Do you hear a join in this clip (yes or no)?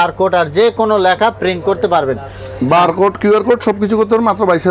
no